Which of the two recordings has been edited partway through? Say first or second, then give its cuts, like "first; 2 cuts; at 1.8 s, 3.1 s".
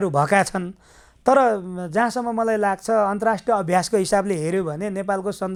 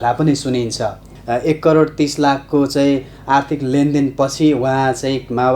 second; 1 cut; at 1.1 s